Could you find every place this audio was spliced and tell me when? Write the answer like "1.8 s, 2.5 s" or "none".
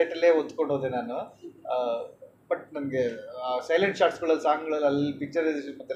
none